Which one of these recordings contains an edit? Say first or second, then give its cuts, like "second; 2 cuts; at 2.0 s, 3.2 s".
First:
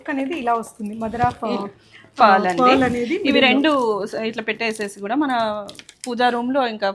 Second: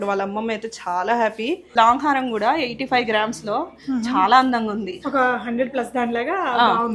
second; 1 cut; at 1.7 s